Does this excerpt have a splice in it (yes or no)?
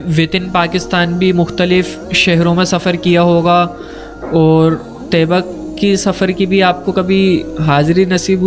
no